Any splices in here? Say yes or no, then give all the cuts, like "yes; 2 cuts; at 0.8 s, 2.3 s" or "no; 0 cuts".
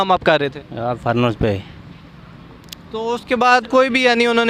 no; 0 cuts